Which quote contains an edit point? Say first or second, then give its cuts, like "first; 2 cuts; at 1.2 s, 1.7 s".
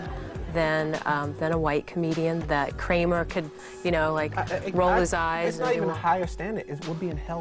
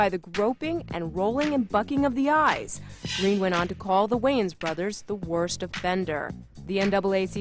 first; 1 cut; at 2.2 s